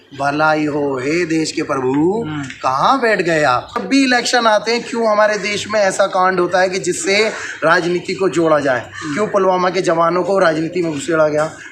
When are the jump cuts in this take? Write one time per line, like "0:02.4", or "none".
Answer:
0:03.8